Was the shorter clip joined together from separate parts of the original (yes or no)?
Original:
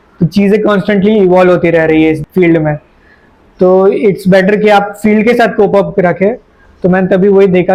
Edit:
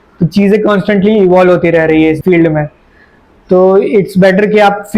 yes